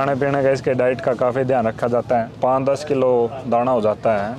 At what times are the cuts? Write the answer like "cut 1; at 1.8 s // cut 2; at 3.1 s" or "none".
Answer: cut 1; at 2.3 s